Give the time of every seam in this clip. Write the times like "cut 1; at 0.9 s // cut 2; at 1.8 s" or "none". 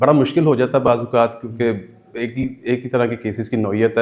none